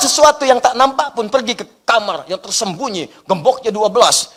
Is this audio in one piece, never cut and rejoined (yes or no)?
yes